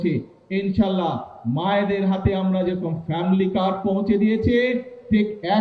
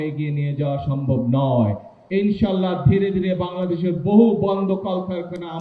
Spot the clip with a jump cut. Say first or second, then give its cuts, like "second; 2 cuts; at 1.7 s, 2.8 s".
second; 1 cut; at 2.0 s